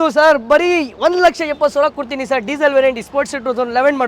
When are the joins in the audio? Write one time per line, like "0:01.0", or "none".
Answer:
none